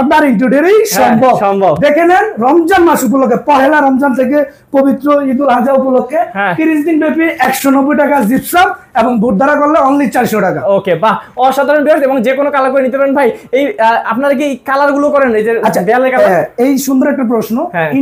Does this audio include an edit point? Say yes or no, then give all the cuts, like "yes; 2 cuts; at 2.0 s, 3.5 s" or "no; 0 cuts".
no; 0 cuts